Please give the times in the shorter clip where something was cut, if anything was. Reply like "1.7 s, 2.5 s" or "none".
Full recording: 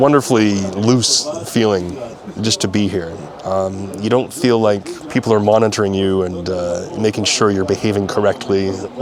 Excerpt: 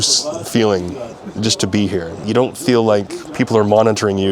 2.2 s